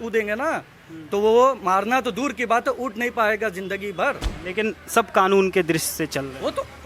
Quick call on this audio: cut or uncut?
cut